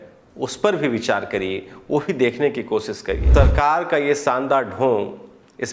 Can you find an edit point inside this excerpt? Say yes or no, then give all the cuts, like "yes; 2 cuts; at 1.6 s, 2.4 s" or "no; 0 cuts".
yes; 1 cut; at 3.2 s